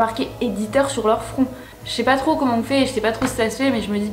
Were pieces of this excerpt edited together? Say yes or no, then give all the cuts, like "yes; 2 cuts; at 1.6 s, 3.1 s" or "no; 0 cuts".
no; 0 cuts